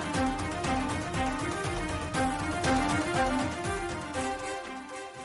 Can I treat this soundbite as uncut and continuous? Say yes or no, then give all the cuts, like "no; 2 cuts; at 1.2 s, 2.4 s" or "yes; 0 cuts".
yes; 0 cuts